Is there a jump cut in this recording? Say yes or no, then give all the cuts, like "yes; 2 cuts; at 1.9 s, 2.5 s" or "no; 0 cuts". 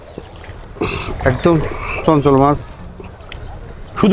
no; 0 cuts